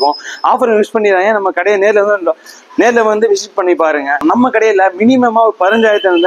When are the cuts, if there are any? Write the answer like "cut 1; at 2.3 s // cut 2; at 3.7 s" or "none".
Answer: cut 1; at 4.2 s